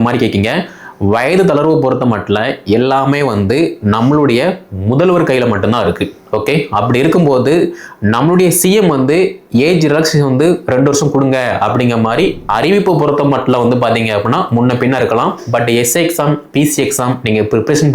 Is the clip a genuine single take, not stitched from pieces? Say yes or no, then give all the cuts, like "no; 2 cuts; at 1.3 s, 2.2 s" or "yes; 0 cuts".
no; 1 cut; at 12.4 s